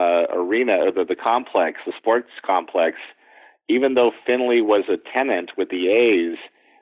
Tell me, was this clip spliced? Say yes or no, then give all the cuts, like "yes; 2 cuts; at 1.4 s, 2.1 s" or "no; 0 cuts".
no; 0 cuts